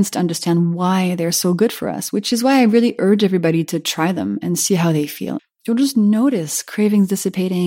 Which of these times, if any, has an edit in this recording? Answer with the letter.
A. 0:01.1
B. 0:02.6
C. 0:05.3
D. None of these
C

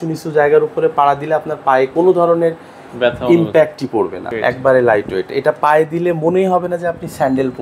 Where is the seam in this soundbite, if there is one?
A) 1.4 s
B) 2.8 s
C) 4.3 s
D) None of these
C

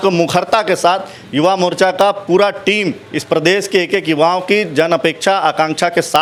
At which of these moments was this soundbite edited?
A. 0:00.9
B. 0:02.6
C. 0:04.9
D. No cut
D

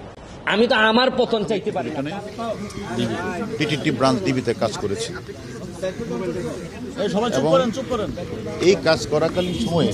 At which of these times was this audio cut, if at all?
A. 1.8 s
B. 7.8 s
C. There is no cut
A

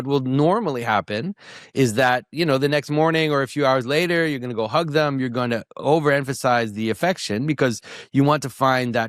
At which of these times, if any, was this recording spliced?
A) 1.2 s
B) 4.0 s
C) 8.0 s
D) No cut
D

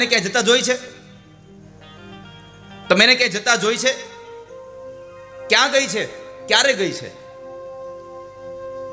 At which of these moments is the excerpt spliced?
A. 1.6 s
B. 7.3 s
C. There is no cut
A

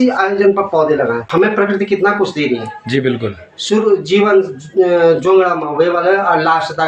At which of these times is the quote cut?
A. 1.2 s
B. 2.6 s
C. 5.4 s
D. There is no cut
A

